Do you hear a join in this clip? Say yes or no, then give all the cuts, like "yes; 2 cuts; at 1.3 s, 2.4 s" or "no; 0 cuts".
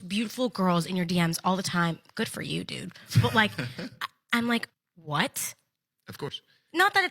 no; 0 cuts